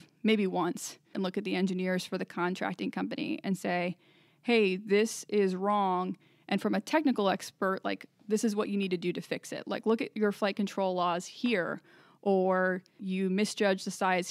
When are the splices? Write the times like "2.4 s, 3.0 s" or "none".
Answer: 1.1 s, 13.0 s